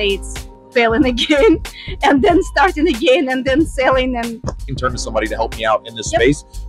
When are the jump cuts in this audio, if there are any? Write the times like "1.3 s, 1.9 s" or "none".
4.8 s